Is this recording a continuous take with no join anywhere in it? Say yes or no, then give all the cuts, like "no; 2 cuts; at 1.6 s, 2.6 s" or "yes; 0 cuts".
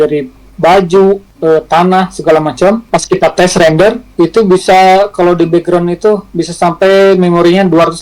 no; 3 cuts; at 1.3 s, 2.8 s, 4.0 s